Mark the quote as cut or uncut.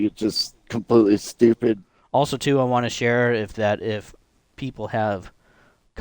cut